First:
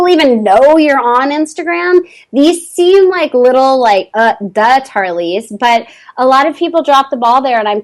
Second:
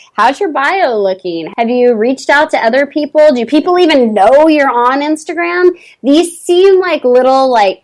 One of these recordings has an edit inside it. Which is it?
second; 1 cut; at 1.4 s

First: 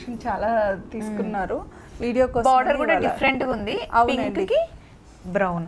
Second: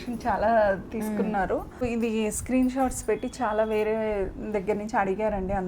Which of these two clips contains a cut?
second; 1 cut; at 1.9 s

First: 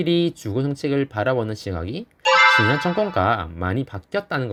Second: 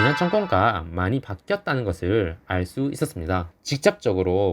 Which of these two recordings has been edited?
second; 1 cut; at 3.5 s

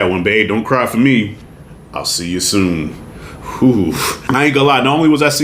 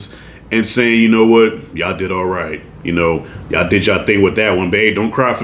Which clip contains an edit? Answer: first; 1 cut; at 4.1 s

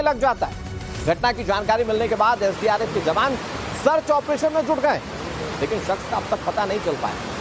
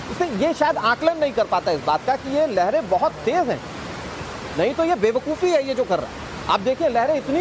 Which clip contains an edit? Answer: first; 1 cut; at 5.3 s

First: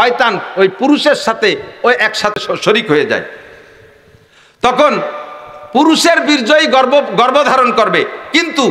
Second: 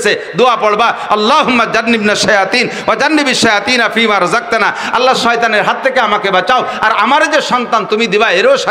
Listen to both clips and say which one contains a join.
first; 1 cut; at 2.3 s

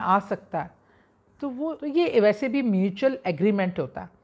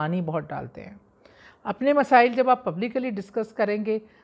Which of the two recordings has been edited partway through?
first; 1 cut; at 1.7 s

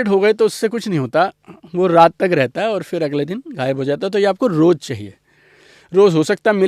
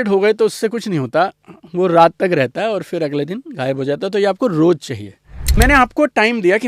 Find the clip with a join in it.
second; 1 cut; at 5.5 s

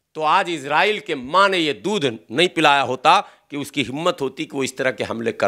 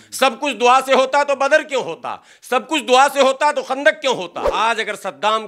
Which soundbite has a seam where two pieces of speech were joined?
second; 1 cut; at 4.4 s

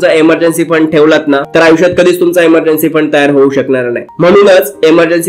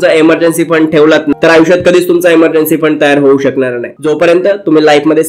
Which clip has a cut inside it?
second; 2 cuts; at 1.4 s, 3.9 s

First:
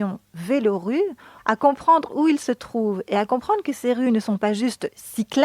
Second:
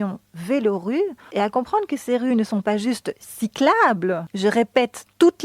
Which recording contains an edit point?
second; 2 cuts; at 1.3 s, 4.3 s

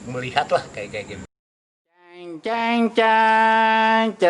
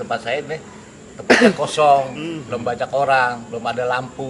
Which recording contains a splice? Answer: first; 1 cut; at 1.4 s

